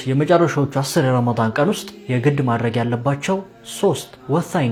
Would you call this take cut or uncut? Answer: uncut